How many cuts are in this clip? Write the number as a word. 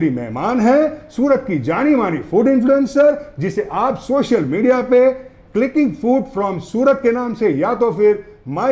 zero